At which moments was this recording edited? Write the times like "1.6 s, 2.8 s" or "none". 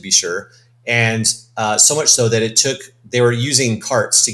none